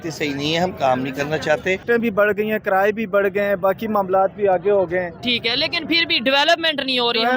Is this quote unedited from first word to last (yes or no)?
no